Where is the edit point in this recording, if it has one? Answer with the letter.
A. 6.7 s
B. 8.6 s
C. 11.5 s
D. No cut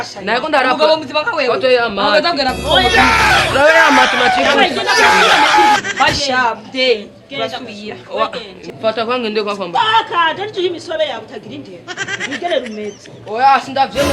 B